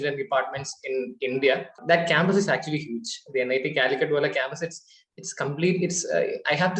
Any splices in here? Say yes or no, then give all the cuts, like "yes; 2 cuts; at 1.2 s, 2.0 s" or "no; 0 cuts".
yes; 1 cut; at 1.8 s